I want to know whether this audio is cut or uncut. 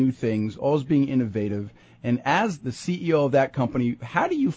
cut